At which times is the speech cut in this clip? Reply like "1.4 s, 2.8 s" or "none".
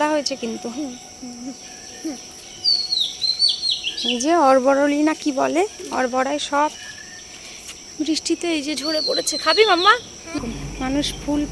10.3 s